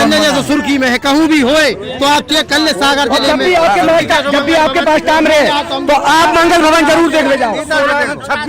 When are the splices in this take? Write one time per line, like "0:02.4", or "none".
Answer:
none